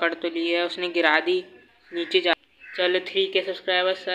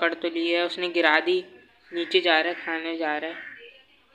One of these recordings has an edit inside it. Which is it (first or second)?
first